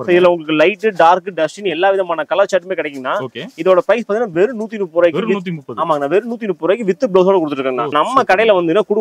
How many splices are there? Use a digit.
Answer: 1